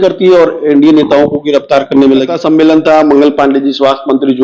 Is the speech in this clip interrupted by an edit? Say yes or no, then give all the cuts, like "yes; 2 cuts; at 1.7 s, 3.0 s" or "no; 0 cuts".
yes; 1 cut; at 2.4 s